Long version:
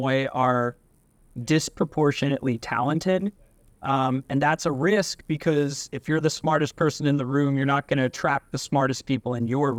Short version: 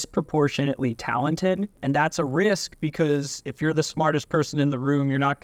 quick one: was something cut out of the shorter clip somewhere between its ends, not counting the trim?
yes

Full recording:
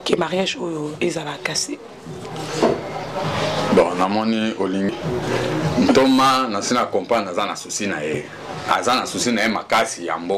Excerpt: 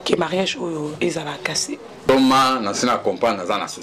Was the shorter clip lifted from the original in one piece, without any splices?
no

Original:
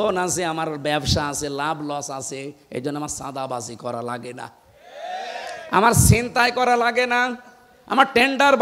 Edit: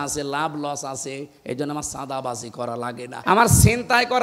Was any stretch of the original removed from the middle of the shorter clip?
yes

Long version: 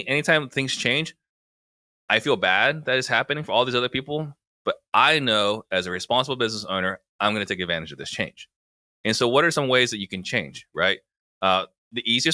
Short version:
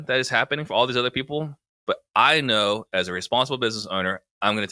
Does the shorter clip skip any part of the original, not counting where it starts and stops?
no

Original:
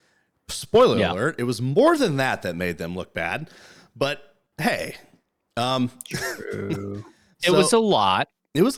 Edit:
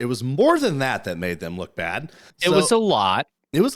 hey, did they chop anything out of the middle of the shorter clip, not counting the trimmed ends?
yes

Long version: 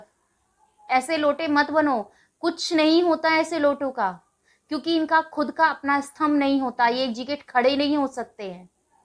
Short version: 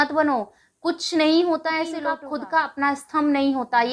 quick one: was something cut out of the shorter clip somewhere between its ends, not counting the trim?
yes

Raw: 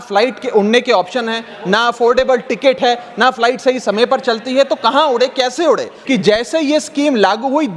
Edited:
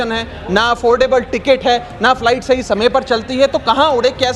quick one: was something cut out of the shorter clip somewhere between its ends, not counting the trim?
no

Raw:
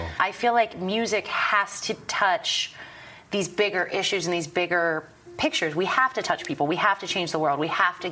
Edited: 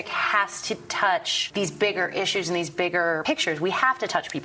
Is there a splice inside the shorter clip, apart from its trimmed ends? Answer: yes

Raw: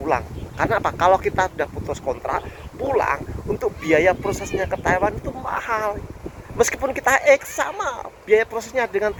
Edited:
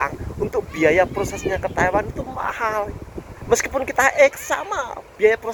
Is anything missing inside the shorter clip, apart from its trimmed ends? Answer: no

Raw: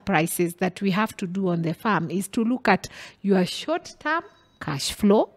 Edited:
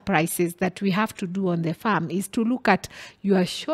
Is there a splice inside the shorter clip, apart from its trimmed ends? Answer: no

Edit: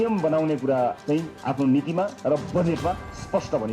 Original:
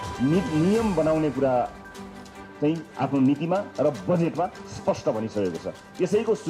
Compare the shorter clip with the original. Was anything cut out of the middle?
yes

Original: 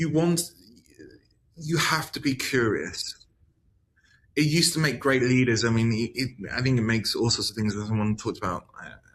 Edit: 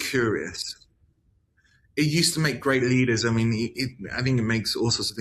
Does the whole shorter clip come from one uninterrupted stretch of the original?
yes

